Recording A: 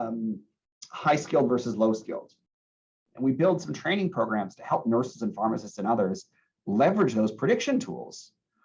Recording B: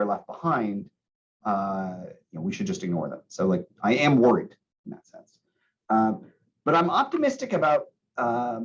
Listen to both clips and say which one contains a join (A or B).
A